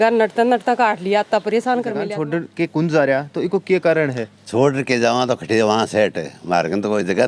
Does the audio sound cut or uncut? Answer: cut